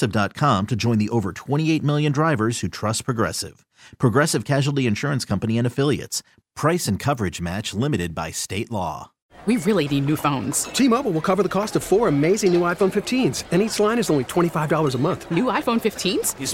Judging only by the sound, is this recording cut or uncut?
cut